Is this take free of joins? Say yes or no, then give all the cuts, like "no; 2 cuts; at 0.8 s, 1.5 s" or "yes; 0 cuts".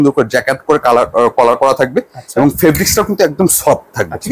yes; 0 cuts